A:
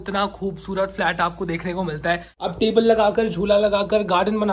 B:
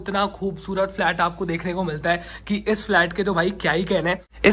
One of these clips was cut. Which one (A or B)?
A